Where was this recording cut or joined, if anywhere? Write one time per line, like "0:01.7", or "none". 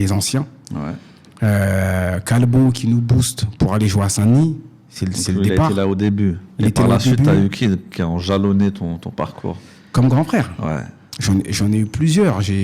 none

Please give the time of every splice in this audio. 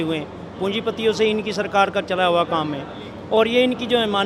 none

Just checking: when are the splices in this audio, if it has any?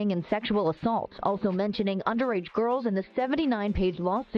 none

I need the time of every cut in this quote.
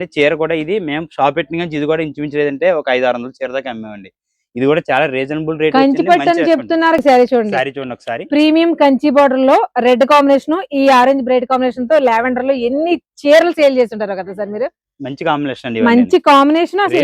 0:07.0

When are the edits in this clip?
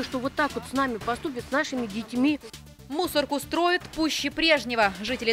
0:02.6

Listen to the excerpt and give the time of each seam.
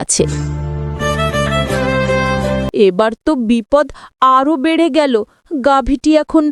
none

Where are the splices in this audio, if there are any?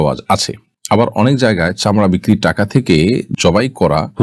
none

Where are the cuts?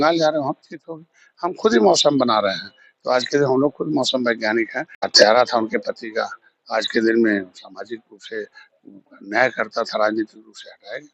0:05.0

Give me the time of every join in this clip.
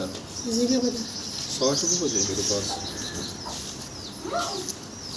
none

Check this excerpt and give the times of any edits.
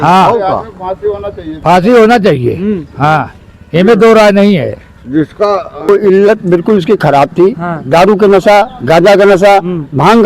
0:05.9

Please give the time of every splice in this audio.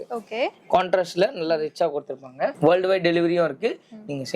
0:02.5

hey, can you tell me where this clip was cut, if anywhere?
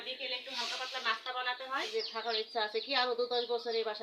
0:01.9

